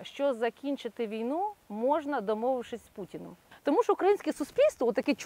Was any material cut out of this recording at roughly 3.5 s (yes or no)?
yes